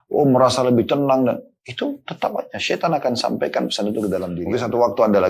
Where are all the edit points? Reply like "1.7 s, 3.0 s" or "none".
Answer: 4.4 s